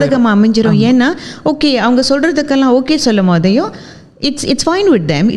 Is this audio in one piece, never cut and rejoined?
yes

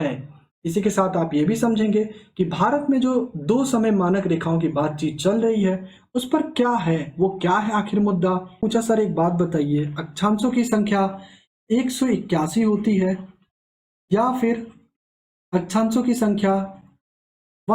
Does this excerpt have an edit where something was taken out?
yes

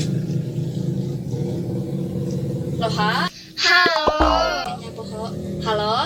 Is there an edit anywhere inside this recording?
no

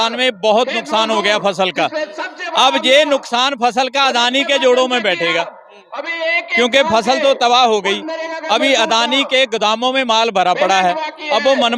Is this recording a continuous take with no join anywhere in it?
yes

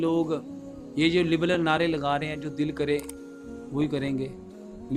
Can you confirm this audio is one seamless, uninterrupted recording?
yes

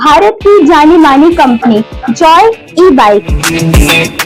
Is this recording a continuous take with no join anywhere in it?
yes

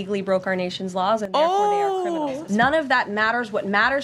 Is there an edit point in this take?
yes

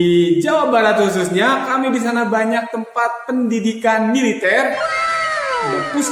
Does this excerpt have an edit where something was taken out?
no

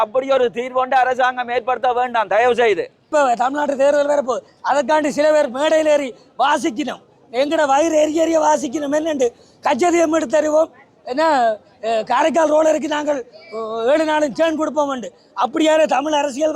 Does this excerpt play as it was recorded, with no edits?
no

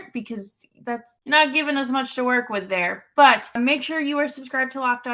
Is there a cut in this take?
yes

